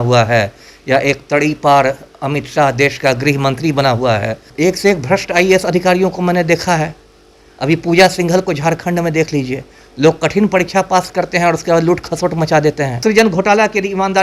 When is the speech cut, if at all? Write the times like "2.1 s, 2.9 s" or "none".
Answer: 4.5 s, 13.0 s